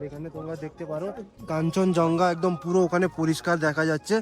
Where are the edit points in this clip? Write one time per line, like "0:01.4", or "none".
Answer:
none